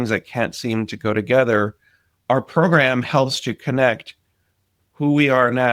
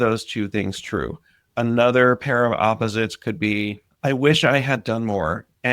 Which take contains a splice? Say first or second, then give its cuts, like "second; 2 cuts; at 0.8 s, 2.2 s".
second; 1 cut; at 3.9 s